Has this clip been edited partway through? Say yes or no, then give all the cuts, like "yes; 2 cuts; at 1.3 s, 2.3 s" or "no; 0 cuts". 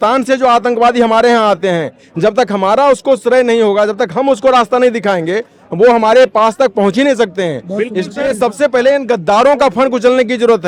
no; 0 cuts